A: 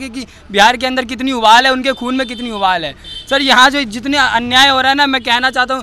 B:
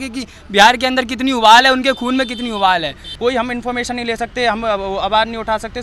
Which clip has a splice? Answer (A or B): B